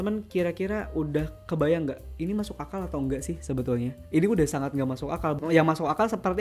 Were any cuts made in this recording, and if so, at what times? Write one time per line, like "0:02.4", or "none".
0:01.4
0:05.4